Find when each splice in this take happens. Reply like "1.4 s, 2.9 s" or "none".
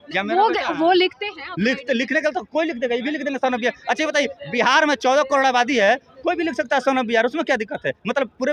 none

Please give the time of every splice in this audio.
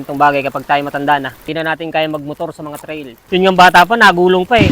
1.4 s, 3.1 s

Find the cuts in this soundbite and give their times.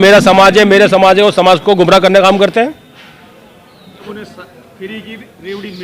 4.0 s

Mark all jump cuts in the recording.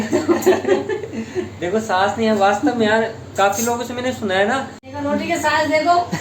4.8 s

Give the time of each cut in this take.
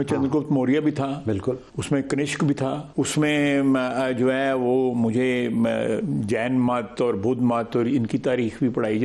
1.7 s, 2.8 s

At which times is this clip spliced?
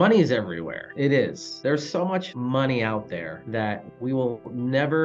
none

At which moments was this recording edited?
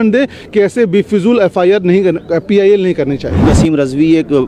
3.4 s

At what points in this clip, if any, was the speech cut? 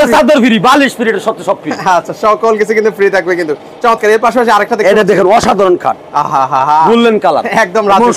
none

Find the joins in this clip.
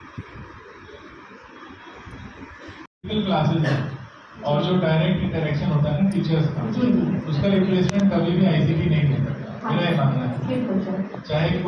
2.9 s

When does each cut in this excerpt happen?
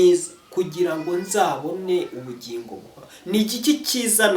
none

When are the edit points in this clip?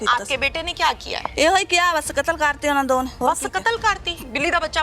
1.3 s, 3.1 s

